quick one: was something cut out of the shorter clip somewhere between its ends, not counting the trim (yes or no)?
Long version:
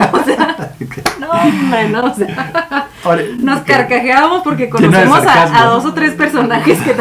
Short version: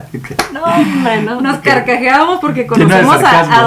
yes